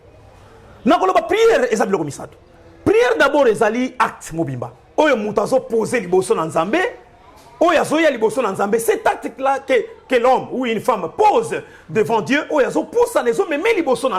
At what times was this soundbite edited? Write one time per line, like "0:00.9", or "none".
none